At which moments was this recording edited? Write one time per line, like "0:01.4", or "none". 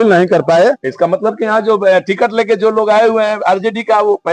0:01.4